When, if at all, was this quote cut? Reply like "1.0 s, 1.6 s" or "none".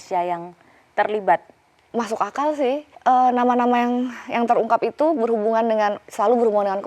1.8 s, 2.9 s